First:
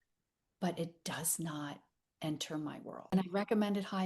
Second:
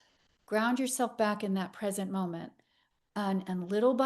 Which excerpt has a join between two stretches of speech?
first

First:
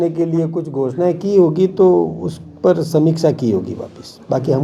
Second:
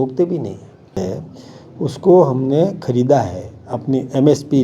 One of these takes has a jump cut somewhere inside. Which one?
second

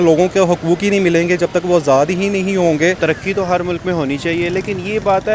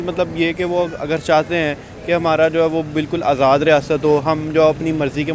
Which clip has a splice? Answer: first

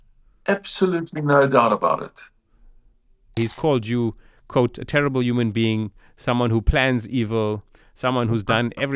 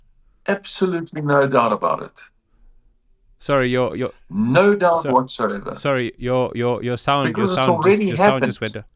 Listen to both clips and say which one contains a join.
first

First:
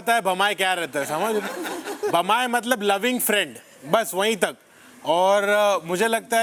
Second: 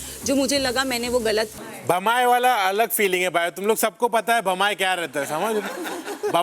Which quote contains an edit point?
second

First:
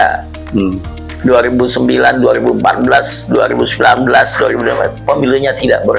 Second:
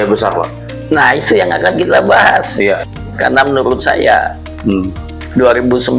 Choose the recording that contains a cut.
second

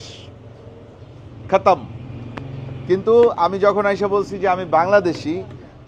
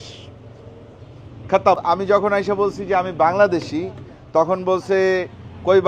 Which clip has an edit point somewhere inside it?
second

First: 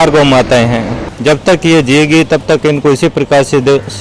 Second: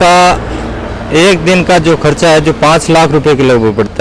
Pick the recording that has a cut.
first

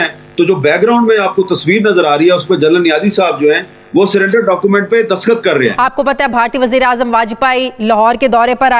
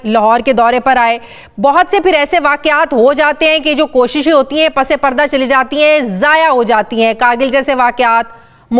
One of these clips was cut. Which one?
first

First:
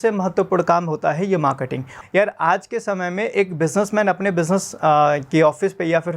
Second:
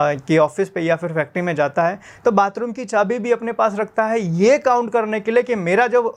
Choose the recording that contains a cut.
first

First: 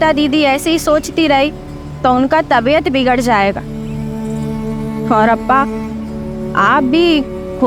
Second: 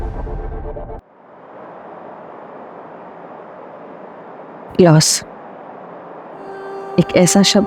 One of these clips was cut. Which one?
second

